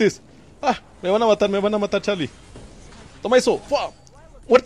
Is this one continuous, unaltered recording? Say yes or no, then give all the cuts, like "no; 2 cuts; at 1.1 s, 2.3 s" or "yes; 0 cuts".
yes; 0 cuts